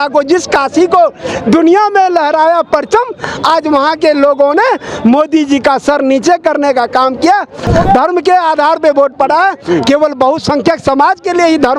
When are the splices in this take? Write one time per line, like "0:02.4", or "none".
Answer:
0:07.6